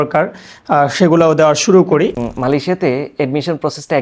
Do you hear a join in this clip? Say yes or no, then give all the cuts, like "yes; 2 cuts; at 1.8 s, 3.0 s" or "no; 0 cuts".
yes; 1 cut; at 2.3 s